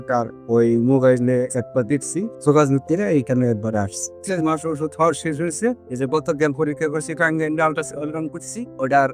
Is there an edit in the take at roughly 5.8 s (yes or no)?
no